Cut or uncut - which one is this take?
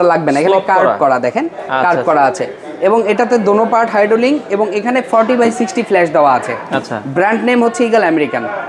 uncut